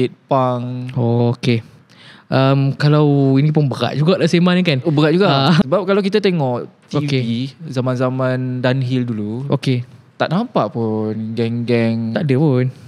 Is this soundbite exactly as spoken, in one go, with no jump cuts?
no; 1 cut; at 5.6 s

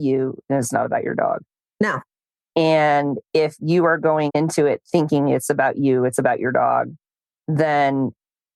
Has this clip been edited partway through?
yes; 1 cut; at 4.3 s

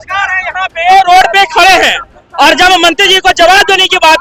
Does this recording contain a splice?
no; 0 cuts

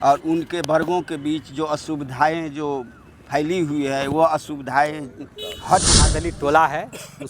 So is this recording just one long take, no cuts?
no; 1 cut; at 6.3 s

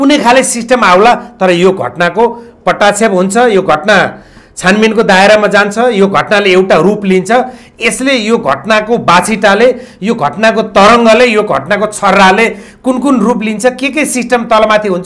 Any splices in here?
no; 0 cuts

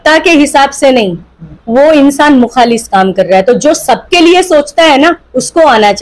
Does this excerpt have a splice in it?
no; 0 cuts

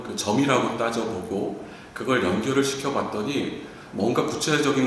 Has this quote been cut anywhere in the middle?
no; 0 cuts

